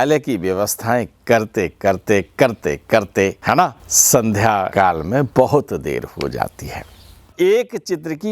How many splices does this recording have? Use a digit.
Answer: 3